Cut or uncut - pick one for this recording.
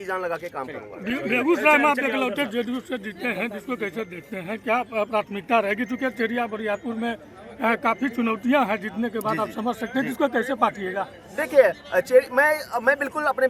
uncut